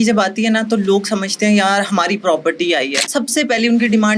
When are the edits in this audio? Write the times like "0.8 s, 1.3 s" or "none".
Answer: 3.0 s